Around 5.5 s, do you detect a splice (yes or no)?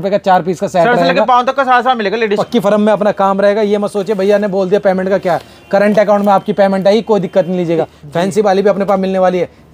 no